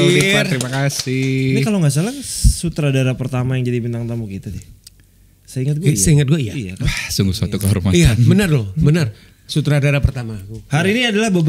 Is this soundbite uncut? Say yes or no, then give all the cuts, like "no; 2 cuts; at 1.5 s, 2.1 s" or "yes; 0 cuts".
yes; 0 cuts